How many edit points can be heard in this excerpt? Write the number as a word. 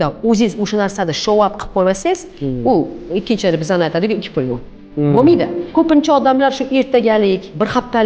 one